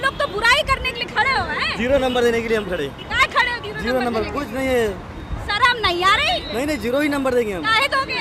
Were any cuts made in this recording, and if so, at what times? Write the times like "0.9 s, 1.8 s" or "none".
none